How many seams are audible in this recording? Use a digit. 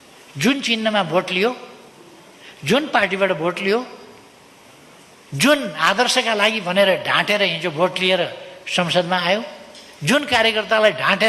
0